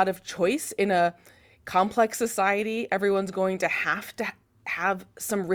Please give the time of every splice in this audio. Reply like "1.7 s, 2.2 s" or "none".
none